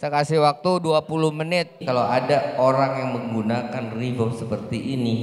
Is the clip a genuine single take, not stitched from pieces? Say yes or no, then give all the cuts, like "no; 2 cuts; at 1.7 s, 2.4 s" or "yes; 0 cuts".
no; 1 cut; at 1.7 s